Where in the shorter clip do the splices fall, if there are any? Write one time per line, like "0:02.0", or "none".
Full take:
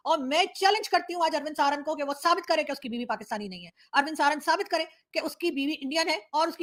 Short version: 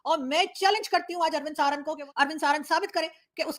0:02.0